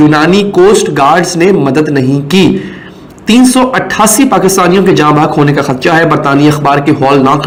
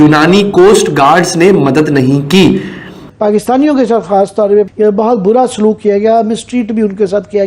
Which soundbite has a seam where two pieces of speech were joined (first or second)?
second